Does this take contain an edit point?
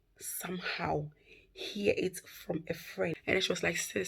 yes; 1 cut; at 3.1 s

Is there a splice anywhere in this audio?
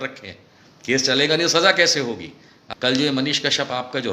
yes; 1 cut; at 2.6 s

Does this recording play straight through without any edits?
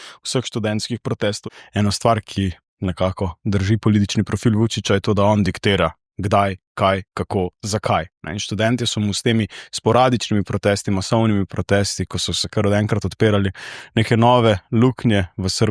no; 1 cut; at 1.4 s

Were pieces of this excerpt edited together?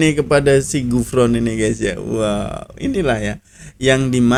no; 0 cuts

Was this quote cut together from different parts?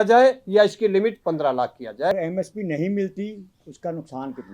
yes; 1 cut; at 2.1 s

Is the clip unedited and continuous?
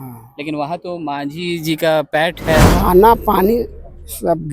no; 1 cut; at 2.7 s

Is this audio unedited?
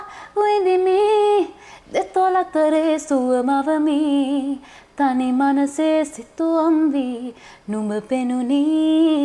yes; 0 cuts

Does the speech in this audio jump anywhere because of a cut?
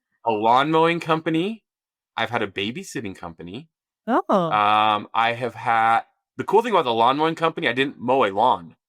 no; 0 cuts

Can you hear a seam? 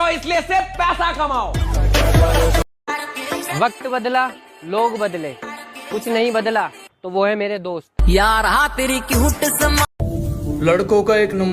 yes; 2 cuts; at 2.8 s, 9.9 s

